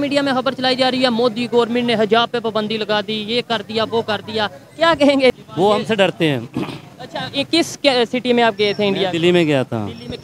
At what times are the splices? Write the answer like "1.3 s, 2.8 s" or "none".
5.4 s